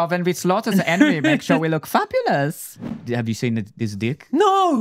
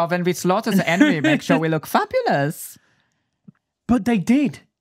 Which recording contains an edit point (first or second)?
first